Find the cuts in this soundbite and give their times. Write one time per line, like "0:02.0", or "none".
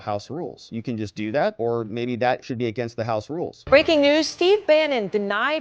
0:03.6